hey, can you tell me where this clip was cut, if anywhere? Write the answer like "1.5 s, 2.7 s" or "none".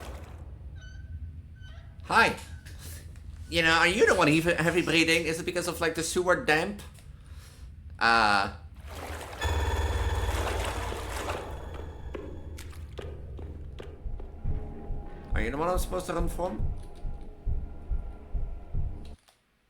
14.0 s